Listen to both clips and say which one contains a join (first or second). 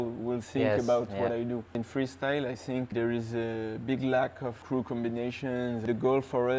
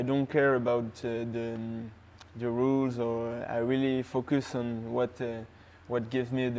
first